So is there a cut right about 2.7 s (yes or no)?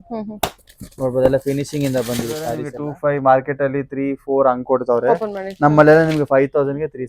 yes